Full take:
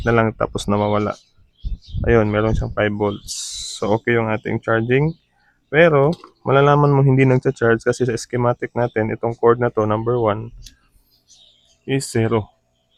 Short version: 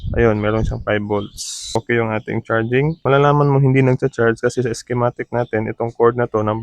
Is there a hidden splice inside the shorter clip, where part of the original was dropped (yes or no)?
yes